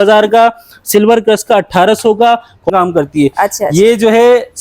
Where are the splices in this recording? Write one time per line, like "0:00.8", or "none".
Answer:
0:02.7